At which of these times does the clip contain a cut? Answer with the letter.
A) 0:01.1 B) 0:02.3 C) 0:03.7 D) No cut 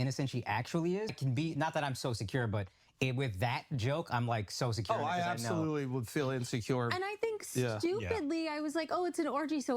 A